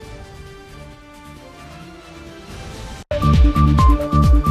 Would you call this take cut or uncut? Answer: uncut